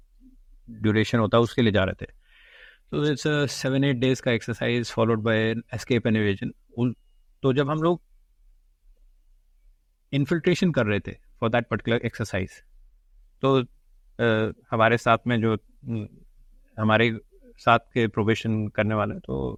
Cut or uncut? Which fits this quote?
uncut